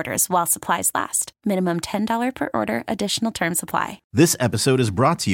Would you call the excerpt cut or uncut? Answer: cut